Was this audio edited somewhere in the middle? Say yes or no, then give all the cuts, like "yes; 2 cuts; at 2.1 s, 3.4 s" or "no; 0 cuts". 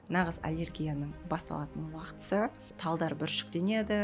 yes; 1 cut; at 2.7 s